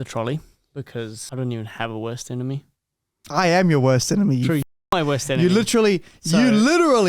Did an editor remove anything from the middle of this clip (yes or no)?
yes